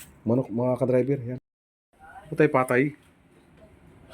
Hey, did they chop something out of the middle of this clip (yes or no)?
yes